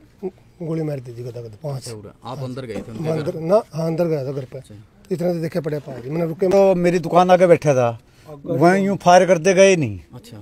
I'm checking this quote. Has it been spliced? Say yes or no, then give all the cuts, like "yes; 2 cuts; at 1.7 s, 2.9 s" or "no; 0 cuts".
yes; 1 cut; at 6.5 s